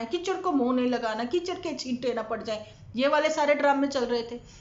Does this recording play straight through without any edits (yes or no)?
yes